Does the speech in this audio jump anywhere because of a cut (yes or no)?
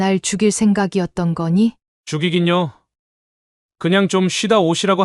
yes